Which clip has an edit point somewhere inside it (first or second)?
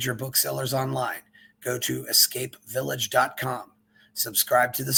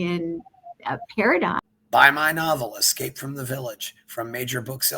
second